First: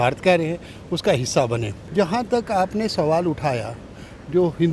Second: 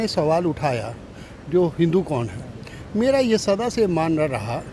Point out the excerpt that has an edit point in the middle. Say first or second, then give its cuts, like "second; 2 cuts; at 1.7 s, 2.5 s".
first; 1 cut; at 1.8 s